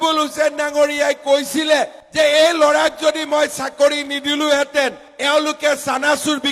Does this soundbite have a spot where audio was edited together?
no; 0 cuts

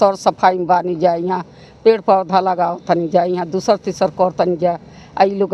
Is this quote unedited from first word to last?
yes; 0 cuts

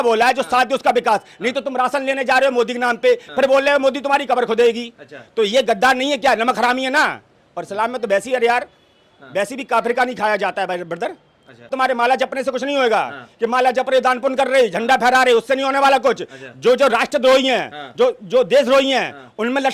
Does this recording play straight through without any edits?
no; 1 cut; at 11.7 s

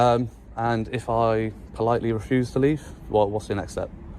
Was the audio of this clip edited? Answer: yes; 1 cut; at 2.4 s

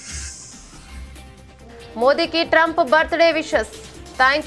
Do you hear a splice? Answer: no; 0 cuts

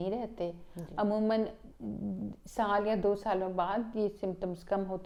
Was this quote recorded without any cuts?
yes; 0 cuts

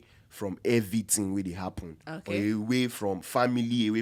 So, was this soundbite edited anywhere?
no; 0 cuts

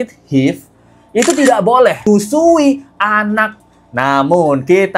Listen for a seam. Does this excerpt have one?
yes; 2 cuts; at 2.1 s, 3.5 s

